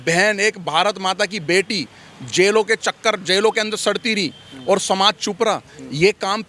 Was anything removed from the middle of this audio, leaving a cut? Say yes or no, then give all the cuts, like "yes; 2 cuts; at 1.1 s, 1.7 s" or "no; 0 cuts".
no; 0 cuts